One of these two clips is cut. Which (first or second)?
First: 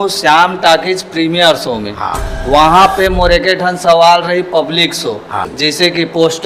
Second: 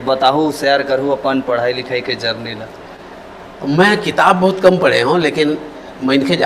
first